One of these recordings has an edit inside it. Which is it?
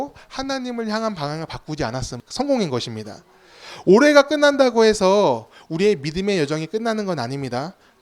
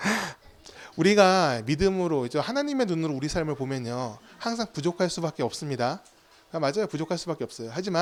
first; 1 cut; at 2.2 s

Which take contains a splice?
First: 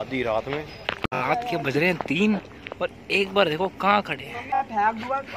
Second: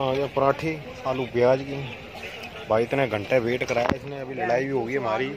first; 2 cuts; at 1.1 s, 4.6 s

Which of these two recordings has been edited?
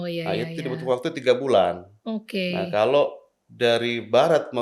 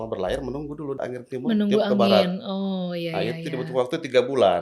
second; 1 cut; at 1.0 s

